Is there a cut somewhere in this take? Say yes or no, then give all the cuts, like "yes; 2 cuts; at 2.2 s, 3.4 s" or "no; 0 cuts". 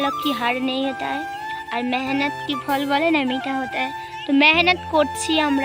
no; 0 cuts